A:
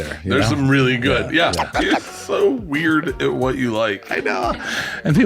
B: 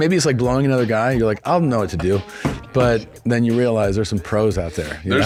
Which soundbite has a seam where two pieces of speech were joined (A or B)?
A